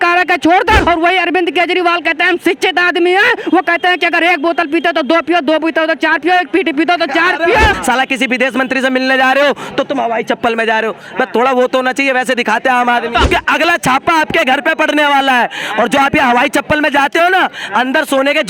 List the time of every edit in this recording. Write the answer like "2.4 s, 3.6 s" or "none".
0.8 s, 7.8 s, 13.3 s